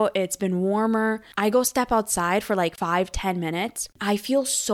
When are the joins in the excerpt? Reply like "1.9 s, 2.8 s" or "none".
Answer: 1.3 s, 2.8 s, 3.9 s